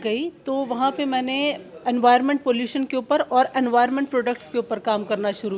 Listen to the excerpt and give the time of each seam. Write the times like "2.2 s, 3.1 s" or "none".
none